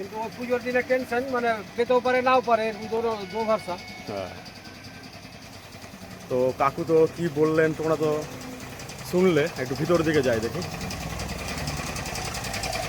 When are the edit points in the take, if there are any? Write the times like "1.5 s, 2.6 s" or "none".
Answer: none